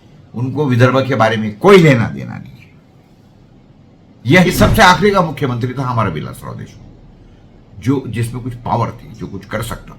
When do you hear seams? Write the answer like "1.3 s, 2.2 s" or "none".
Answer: 4.5 s